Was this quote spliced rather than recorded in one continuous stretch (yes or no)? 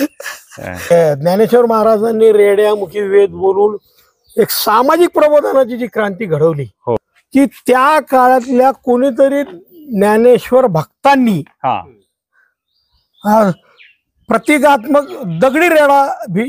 yes